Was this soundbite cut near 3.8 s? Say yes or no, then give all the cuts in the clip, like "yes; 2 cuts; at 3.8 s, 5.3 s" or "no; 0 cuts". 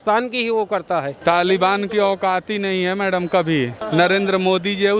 yes; 2 cuts; at 1.1 s, 3.8 s